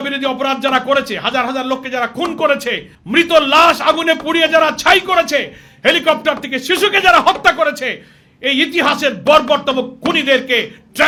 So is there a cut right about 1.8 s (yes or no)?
no